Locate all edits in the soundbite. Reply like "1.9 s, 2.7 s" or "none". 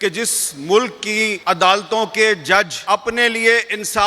1.4 s, 2.8 s